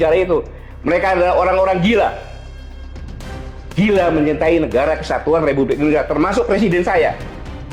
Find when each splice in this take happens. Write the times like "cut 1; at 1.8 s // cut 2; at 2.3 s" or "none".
none